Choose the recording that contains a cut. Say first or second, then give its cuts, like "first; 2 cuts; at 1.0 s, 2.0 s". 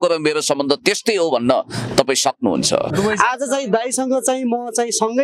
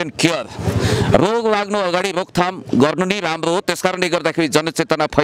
first; 1 cut; at 2.9 s